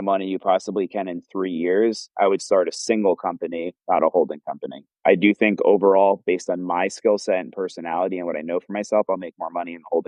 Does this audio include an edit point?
no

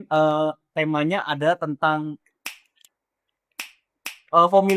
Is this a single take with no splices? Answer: yes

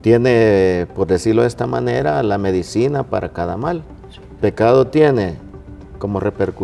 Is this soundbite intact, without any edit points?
no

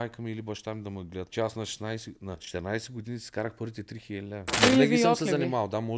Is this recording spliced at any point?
yes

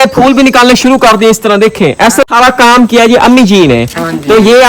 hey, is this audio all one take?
no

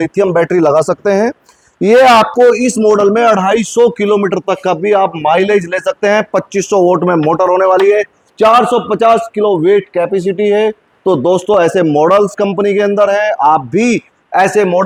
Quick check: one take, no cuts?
yes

